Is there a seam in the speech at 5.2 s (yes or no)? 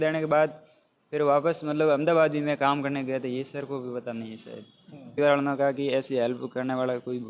yes